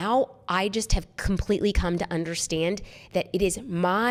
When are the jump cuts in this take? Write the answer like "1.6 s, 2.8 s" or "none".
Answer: none